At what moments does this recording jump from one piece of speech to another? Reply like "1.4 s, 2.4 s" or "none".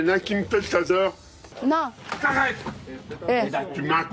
1.5 s